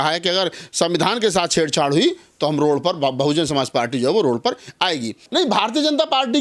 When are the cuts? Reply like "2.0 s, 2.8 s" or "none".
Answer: 5.2 s